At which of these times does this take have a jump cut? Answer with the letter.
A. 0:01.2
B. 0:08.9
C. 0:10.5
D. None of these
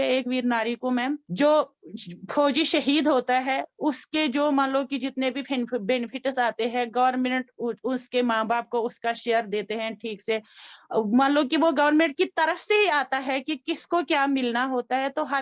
A